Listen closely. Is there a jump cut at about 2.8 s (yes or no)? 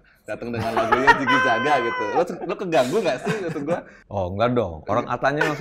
no